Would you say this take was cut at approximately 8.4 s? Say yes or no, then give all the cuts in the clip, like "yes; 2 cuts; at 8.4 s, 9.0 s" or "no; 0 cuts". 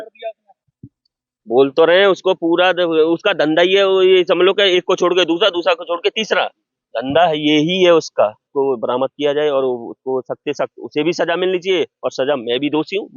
yes; 1 cut; at 8.4 s